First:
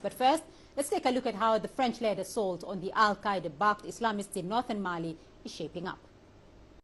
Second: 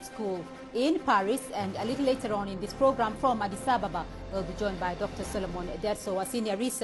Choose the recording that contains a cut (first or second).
second